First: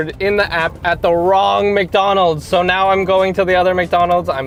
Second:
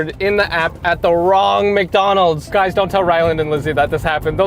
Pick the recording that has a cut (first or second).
second